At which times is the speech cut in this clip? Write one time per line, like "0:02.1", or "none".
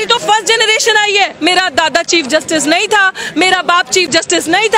0:01.3